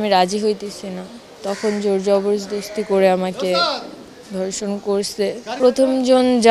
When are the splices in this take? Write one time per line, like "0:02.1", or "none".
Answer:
0:05.5